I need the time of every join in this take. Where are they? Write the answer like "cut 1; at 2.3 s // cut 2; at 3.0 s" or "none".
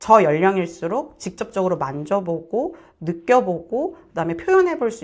none